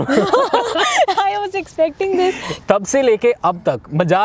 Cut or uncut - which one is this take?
cut